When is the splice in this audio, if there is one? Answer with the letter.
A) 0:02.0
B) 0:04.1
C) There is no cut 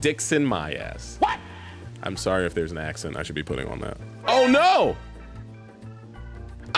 B